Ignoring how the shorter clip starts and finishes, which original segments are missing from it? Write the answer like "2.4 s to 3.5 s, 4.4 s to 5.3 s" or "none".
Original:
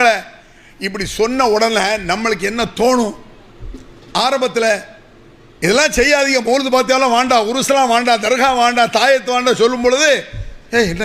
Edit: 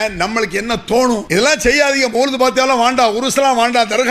3.1 s to 5.6 s